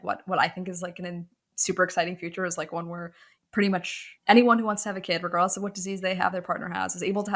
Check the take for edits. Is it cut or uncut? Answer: cut